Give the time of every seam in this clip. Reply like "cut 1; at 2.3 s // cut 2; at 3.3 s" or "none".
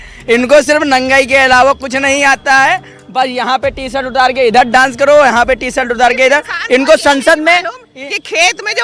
none